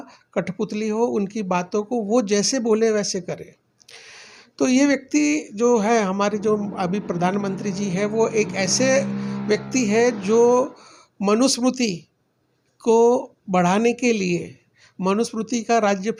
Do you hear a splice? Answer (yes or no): no